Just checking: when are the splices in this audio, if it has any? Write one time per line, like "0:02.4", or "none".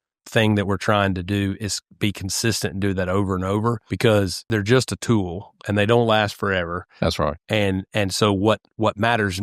0:03.9
0:04.4